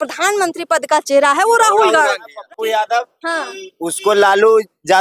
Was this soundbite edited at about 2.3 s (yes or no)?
yes